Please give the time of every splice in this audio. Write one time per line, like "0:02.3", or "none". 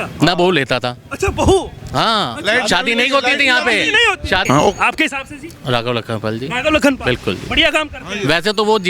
0:04.4